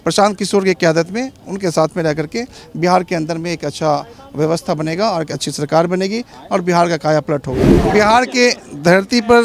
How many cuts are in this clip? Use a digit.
1